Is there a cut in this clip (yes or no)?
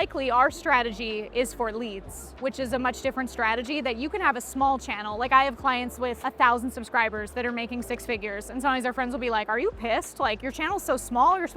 no